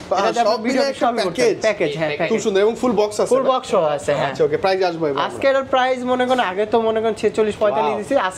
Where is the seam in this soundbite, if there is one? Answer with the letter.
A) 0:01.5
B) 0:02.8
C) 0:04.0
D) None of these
D